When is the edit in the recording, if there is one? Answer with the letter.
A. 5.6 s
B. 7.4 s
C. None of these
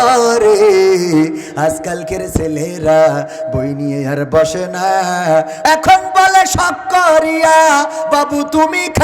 A